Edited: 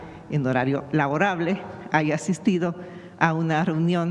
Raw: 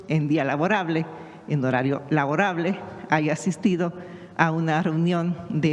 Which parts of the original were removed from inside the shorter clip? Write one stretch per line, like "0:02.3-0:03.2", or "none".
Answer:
none